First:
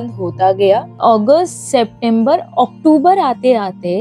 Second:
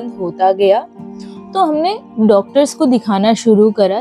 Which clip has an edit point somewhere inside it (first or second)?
first